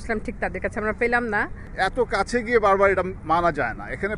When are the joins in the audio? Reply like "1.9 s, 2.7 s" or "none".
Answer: 1.6 s